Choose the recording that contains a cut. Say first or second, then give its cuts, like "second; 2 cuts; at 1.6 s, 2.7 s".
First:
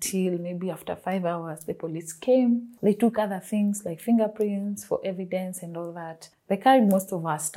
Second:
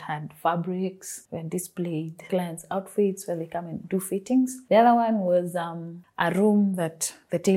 second; 1 cut; at 2.2 s